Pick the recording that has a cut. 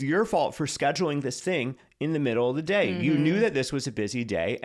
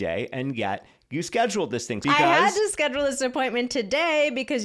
second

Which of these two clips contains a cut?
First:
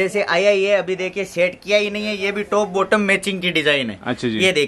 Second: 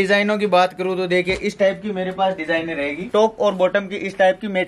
second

